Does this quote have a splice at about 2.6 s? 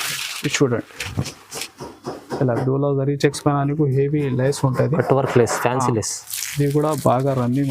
yes; 1 cut; at 2.6 s

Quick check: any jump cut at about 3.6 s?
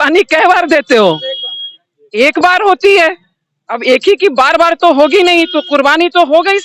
no; 0 cuts

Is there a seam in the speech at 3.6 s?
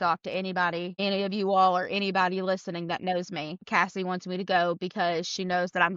yes; 2 cuts; at 0.9 s, 3.6 s

